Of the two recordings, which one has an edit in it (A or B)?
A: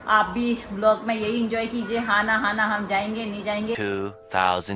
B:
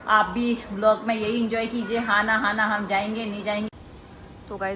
B